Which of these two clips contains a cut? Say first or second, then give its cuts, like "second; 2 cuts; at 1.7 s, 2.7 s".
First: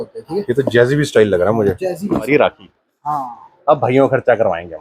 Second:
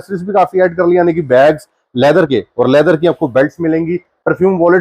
first; 1 cut; at 2.3 s